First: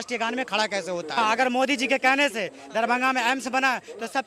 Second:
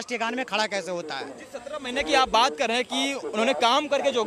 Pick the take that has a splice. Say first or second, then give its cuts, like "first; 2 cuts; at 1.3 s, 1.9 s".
first; 1 cut; at 1.2 s